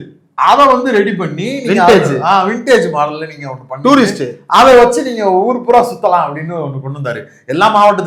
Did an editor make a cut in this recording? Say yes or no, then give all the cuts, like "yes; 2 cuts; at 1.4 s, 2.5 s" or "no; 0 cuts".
no; 0 cuts